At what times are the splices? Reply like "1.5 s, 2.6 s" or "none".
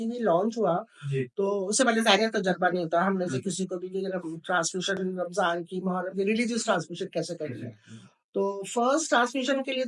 none